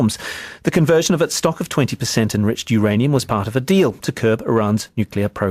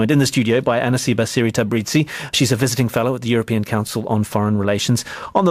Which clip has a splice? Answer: second; 1 cut; at 1.7 s

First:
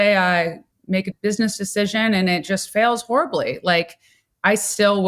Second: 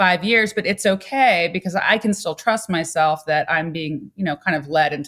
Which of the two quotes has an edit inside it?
first; 1 cut; at 0.9 s

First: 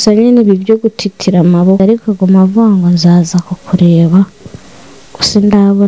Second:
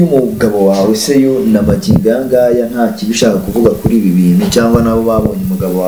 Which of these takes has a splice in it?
first; 1 cut; at 1.8 s

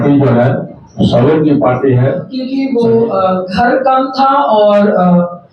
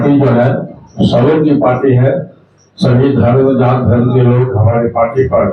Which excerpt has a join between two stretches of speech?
first; 1 cut; at 2.3 s

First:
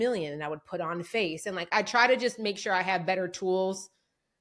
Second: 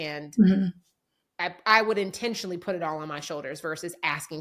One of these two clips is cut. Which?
first; 1 cut; at 1.7 s

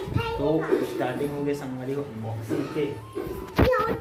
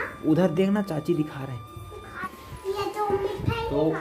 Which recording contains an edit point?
second; 1 cut; at 2.2 s

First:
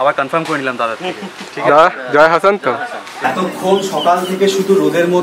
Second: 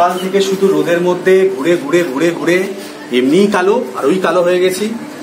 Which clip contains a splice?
first; 1 cut; at 3.1 s

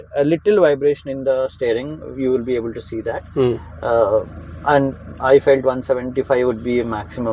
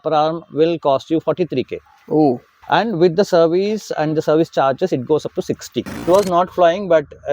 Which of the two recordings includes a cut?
second; 2 cuts; at 2.6 s, 6.0 s

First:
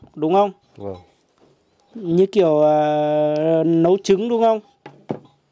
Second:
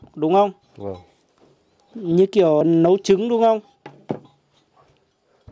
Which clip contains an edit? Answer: second; 1 cut; at 2.6 s

